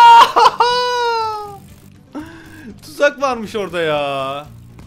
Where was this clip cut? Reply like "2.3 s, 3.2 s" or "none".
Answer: none

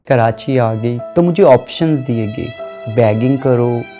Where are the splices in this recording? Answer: 0.9 s

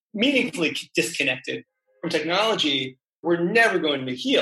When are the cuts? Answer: 3.2 s

